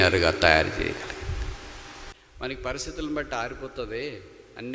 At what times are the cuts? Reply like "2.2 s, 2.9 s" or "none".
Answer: 2.1 s